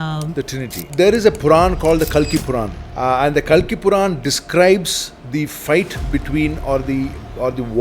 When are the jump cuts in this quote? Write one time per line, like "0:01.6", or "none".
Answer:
0:00.9
0:02.8

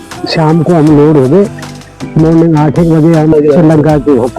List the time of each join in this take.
0:03.3

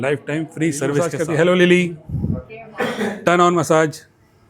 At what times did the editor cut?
0:01.1

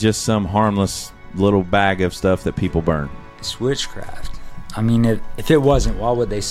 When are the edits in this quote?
none

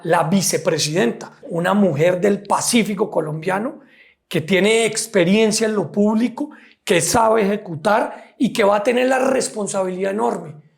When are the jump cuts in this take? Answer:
0:01.3

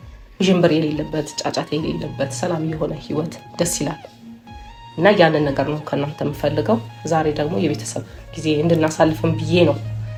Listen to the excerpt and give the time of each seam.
none

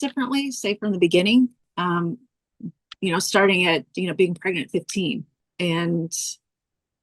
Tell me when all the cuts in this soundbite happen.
none

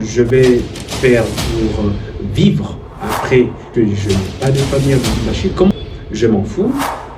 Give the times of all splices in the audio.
0:03.6
0:05.7

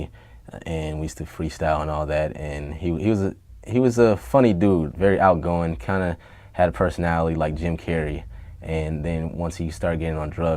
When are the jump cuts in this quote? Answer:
0:08.9

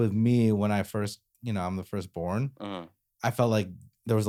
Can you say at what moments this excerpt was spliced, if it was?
none

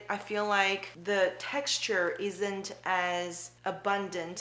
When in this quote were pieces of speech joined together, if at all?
0:00.9
0:03.5

